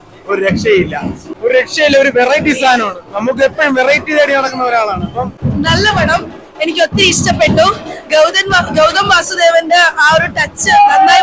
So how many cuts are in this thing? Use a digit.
2